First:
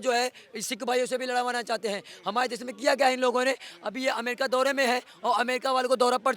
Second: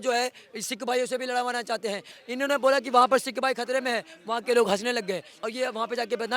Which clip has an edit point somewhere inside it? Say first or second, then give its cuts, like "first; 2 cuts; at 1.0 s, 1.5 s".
second; 2 cuts; at 2.1 s, 5.3 s